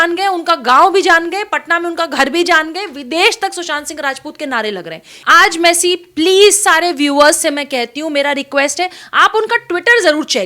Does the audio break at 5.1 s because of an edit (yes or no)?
yes